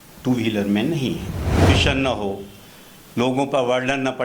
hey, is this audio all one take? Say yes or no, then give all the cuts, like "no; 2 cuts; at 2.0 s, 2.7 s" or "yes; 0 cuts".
no; 1 cut; at 1.7 s